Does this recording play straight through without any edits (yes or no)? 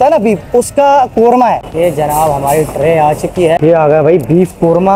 no